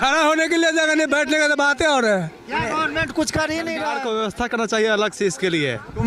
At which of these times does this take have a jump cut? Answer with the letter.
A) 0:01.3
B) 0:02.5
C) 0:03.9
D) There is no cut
C